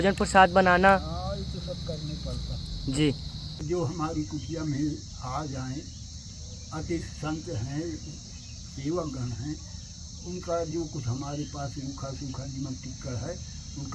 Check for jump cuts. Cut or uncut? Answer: cut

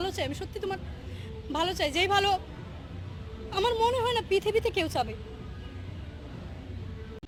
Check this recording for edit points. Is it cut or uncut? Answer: uncut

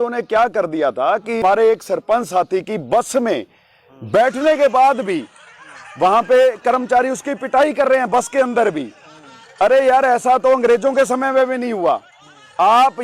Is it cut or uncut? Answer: cut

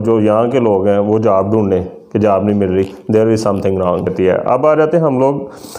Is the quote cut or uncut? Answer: cut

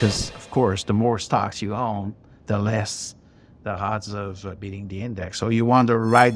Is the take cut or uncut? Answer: uncut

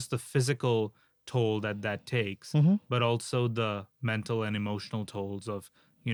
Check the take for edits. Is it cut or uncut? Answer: uncut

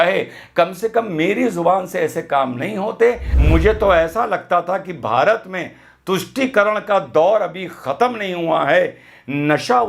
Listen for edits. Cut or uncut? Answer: cut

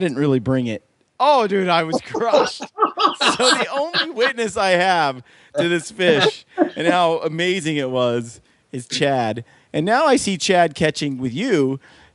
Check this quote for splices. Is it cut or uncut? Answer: uncut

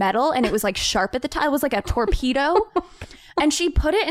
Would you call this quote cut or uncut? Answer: uncut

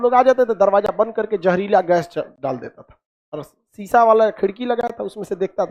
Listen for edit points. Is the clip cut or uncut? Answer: uncut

